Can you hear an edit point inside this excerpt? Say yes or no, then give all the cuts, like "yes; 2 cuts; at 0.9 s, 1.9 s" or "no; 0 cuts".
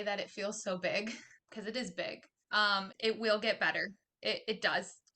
yes; 2 cuts; at 1.4 s, 2.9 s